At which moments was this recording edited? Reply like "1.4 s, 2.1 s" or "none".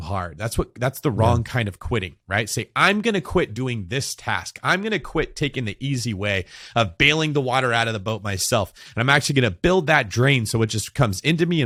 none